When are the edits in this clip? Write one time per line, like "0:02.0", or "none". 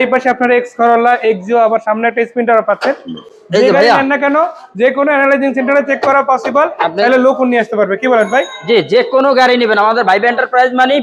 none